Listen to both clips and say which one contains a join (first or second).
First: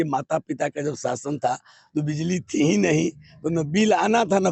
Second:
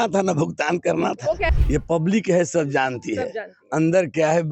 second